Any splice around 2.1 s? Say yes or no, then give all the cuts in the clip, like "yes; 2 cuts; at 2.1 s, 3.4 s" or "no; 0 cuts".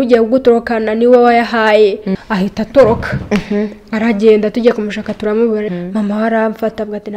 yes; 2 cuts; at 2.1 s, 5.7 s